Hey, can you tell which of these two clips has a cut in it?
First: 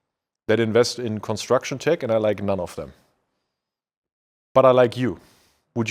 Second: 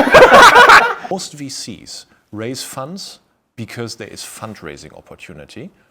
second; 1 cut; at 1.1 s

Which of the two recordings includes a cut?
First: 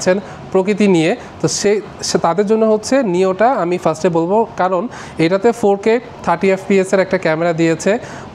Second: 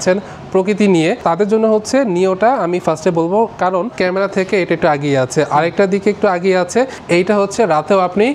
second; 3 cuts; at 1.2 s, 3.9 s, 7.0 s

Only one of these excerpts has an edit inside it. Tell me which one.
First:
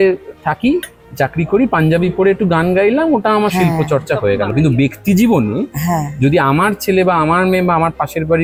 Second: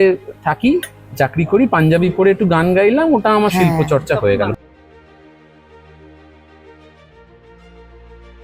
second; 1 cut; at 4.5 s

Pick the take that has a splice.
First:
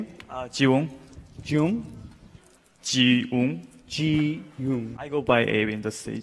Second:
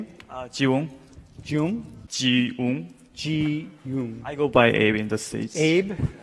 second; 1 cut; at 2.0 s

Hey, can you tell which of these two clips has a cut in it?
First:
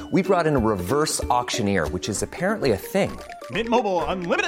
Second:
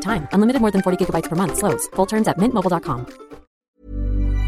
second; 1 cut; at 3.5 s

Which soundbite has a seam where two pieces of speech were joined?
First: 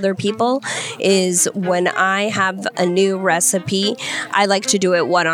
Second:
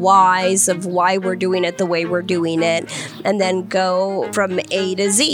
second; 1 cut; at 4.3 s

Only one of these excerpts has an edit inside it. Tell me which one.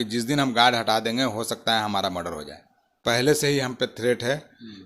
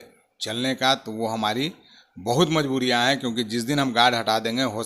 first; 1 cut; at 3.0 s

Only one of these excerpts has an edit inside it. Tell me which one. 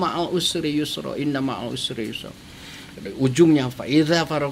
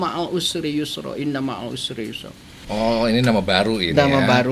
second; 1 cut; at 2.6 s

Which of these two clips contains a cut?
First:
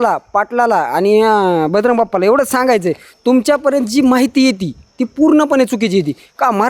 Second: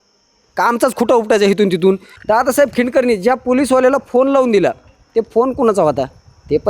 second; 1 cut; at 2.1 s

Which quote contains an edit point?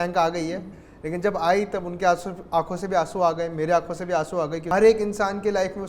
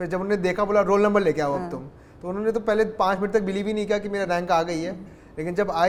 first; 1 cut; at 4.6 s

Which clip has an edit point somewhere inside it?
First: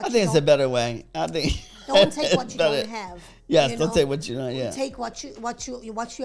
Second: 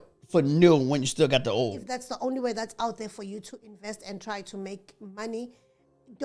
second; 1 cut; at 1.8 s

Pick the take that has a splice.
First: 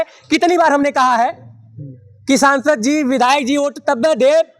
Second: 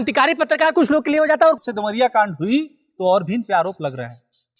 second; 1 cut; at 1.6 s

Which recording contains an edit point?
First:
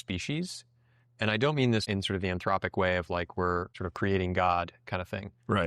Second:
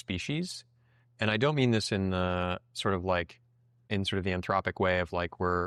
first; 2 cuts; at 1.8 s, 3.8 s

